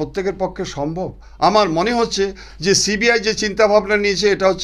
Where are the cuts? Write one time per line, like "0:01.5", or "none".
none